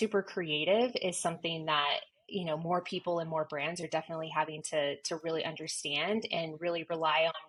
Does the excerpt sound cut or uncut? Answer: uncut